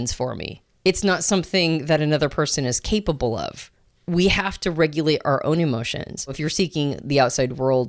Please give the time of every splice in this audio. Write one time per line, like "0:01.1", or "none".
0:06.4